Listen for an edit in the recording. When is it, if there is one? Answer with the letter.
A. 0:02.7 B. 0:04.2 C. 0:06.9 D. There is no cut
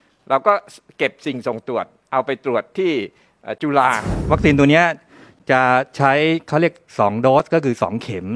B